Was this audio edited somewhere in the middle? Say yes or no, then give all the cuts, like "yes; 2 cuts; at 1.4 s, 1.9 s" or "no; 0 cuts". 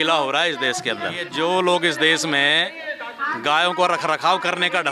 yes; 1 cut; at 1.2 s